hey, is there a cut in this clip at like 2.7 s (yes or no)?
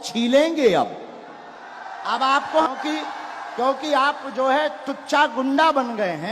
yes